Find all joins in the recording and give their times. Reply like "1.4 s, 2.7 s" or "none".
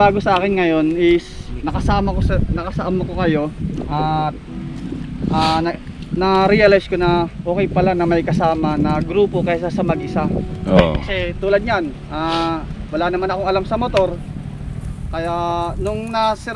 none